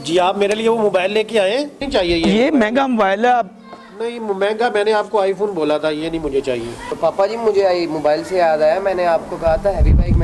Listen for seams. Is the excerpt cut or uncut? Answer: cut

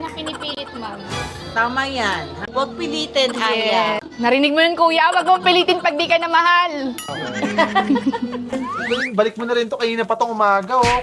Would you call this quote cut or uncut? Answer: cut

